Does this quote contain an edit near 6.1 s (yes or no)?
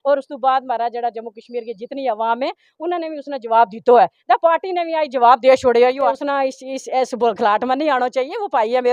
yes